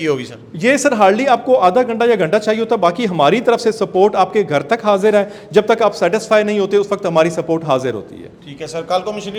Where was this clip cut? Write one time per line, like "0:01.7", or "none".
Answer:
none